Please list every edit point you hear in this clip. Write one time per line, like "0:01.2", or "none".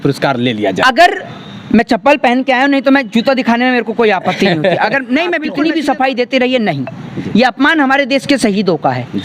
0:05.5